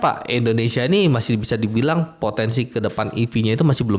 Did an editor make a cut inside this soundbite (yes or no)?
no